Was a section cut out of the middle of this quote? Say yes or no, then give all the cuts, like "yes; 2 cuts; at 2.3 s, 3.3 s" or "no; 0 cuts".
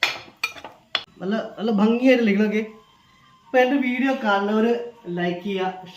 yes; 1 cut; at 1.1 s